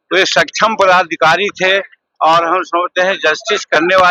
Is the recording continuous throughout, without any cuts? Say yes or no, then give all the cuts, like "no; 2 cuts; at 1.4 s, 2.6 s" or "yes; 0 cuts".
yes; 0 cuts